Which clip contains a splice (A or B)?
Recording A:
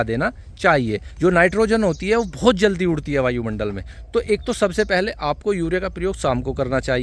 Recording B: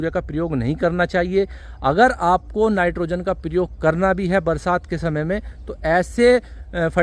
A